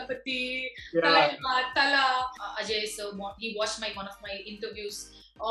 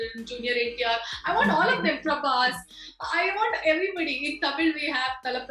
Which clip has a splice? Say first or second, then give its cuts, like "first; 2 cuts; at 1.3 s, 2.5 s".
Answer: first; 1 cut; at 2.4 s